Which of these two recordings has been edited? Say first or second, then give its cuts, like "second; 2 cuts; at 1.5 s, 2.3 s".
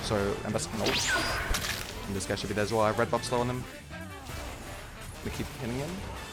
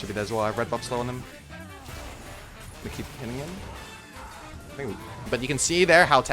second; 1 cut; at 5.3 s